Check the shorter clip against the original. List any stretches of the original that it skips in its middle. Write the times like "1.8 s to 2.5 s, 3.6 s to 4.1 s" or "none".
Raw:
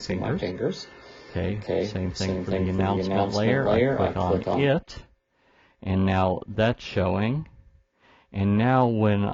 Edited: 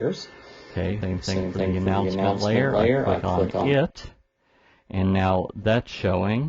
1.6 s to 1.9 s